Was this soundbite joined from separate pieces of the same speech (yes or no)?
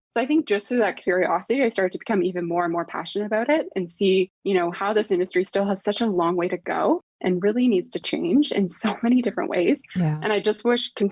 yes